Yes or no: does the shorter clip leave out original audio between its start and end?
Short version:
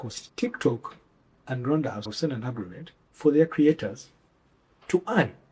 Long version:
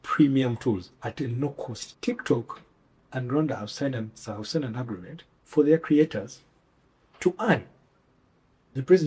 yes